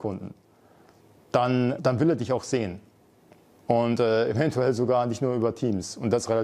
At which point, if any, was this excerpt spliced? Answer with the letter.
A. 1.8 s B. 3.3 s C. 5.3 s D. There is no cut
A